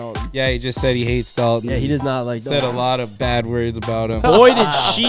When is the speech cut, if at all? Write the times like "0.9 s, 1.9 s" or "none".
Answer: 3.1 s, 4.2 s